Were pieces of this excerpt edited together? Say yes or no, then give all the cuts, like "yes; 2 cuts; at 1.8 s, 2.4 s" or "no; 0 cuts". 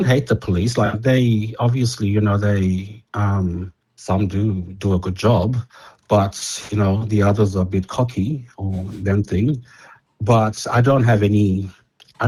no; 0 cuts